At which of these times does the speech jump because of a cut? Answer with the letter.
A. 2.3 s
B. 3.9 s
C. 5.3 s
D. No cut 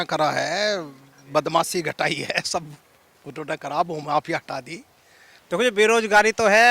C